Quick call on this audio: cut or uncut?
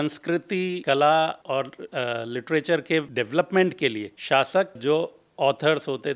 cut